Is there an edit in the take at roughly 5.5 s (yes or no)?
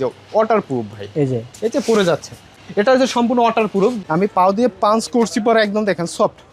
no